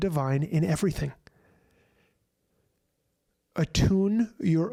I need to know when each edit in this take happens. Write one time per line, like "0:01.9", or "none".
none

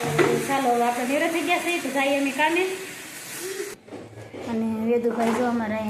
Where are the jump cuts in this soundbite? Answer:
0:03.8

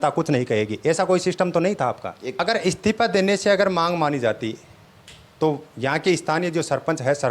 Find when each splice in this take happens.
0:02.2

